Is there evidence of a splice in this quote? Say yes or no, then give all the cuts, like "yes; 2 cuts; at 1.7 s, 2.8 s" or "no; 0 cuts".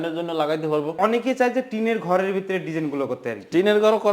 yes; 1 cut; at 1.0 s